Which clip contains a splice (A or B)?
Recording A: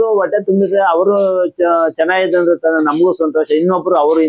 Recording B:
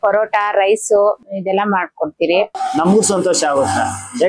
B